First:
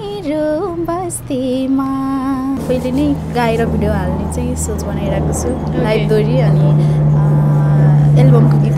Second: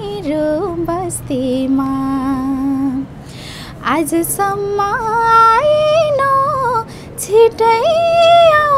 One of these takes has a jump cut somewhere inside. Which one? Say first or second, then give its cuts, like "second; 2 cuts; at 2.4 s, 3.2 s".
first; 1 cut; at 2.6 s